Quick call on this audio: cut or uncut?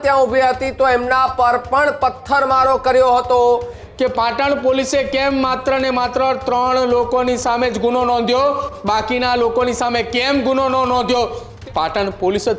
cut